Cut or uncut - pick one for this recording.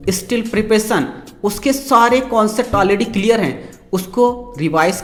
uncut